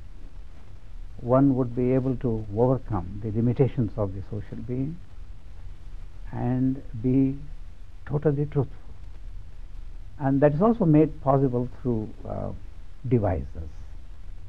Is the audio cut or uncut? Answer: uncut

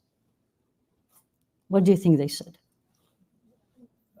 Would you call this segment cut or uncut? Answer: uncut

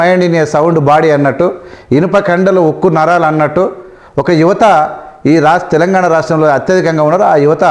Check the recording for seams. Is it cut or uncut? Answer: uncut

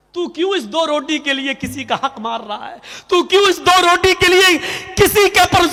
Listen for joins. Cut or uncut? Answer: uncut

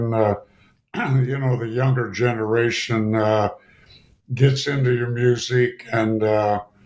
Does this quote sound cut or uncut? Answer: uncut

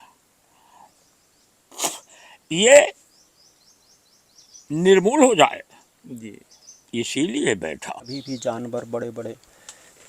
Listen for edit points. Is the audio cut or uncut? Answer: cut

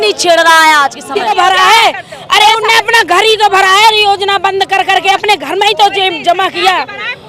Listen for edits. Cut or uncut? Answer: cut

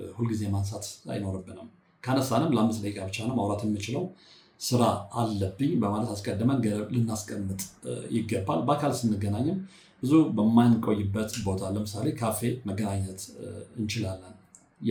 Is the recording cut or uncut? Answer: uncut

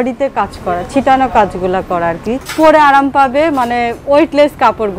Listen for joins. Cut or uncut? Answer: cut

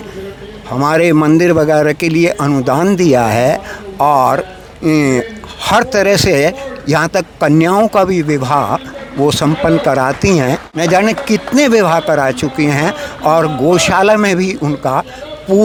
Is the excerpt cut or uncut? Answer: uncut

